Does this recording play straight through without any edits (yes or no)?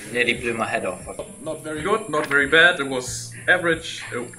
no